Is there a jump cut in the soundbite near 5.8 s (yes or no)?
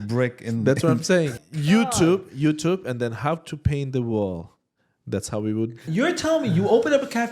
yes